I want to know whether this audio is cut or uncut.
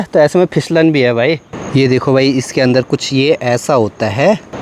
cut